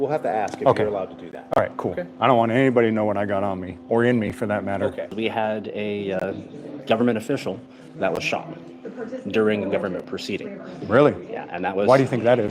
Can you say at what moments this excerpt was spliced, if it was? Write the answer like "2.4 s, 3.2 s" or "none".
5.1 s

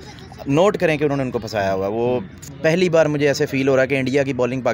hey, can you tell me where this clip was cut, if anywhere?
2.4 s

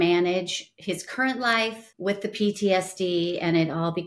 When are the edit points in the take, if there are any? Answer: 1.9 s

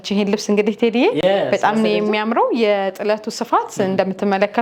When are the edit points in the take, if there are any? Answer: none

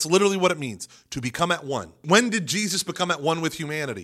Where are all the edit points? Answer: 1.9 s

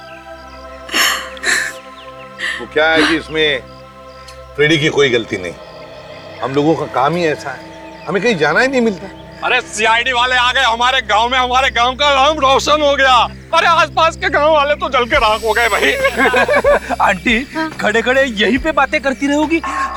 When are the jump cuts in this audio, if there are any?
none

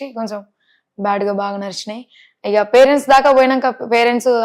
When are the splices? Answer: none

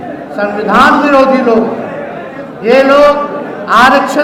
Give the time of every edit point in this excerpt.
none

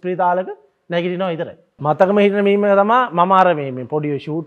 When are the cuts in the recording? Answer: 1.8 s

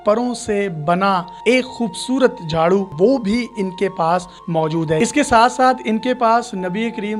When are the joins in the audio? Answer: 2.9 s, 5.0 s

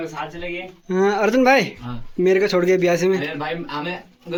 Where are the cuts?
none

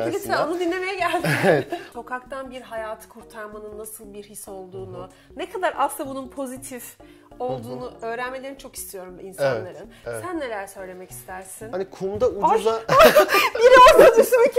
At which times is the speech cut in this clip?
1.9 s, 11.5 s

